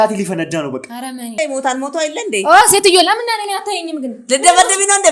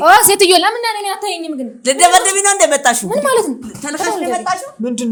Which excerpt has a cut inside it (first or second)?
first